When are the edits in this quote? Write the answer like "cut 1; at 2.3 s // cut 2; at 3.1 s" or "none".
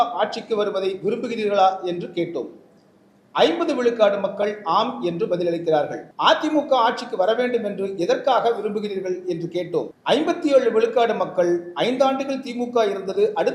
cut 1; at 6.0 s // cut 2; at 9.9 s